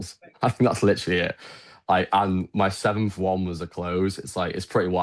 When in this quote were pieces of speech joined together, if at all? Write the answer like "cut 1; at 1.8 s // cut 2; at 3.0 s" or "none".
none